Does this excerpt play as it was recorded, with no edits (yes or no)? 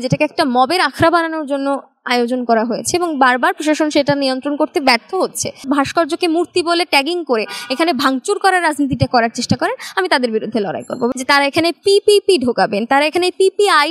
no